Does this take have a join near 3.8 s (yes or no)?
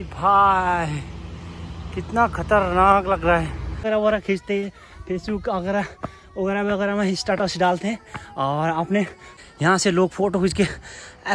yes